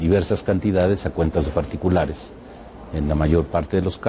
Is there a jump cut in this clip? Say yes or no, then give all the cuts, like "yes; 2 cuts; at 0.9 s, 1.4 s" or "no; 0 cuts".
yes; 1 cut; at 1.7 s